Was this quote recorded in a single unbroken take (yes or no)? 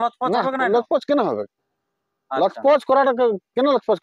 yes